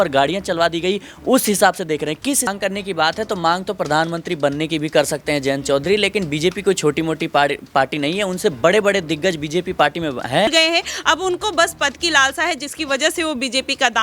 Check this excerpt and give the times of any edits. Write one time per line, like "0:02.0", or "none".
0:02.5
0:10.5